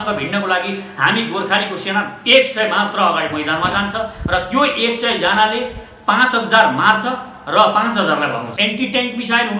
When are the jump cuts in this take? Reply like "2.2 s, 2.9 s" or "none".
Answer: 8.5 s